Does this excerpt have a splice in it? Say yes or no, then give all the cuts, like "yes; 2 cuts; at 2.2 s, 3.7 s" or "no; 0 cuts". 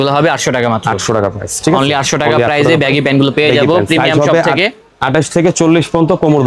no; 0 cuts